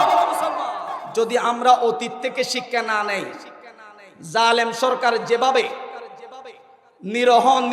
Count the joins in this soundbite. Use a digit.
1